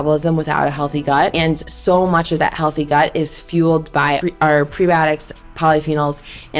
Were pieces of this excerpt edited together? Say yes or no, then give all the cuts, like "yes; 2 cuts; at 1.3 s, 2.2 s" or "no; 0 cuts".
yes; 2 cuts; at 1.3 s, 4.2 s